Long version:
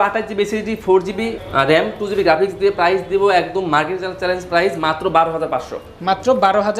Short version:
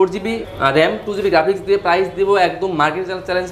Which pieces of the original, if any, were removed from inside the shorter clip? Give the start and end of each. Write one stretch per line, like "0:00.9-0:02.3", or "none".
none